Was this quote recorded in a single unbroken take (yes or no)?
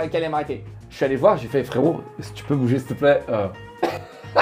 yes